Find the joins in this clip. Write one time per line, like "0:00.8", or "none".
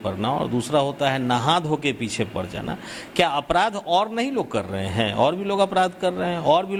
none